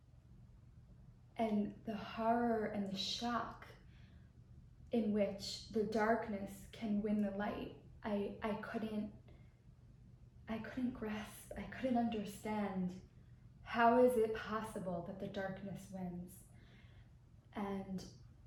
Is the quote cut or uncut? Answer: uncut